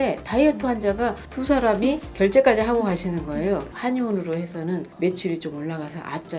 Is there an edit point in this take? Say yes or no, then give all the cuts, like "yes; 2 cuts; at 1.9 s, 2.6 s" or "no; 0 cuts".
yes; 1 cut; at 3.7 s